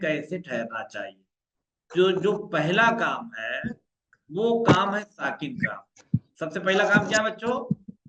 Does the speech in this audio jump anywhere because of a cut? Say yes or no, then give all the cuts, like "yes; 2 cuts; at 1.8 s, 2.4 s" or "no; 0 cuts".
no; 0 cuts